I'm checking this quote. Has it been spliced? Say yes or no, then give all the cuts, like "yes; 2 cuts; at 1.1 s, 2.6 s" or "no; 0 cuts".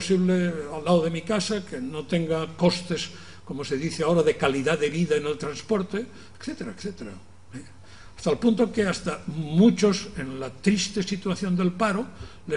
yes; 1 cut; at 4.7 s